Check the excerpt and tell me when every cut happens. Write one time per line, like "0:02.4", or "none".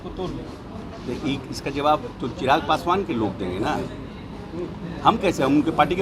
none